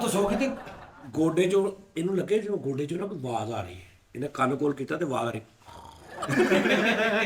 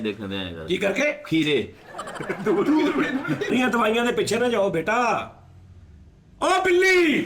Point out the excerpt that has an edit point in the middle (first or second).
second